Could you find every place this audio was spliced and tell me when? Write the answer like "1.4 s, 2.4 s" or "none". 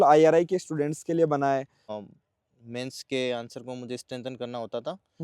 1.8 s